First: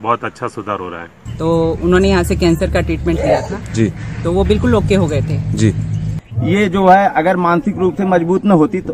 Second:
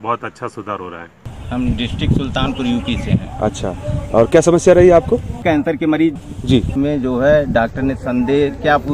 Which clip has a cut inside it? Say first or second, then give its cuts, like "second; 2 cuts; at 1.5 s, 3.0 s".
first; 2 cuts; at 1.2 s, 6.2 s